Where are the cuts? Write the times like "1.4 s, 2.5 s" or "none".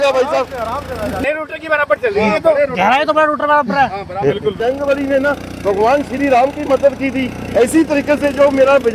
1.2 s, 4.6 s